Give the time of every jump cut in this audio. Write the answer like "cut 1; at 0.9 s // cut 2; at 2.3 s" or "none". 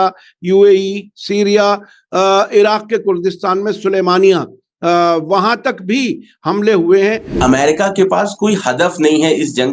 cut 1; at 7.4 s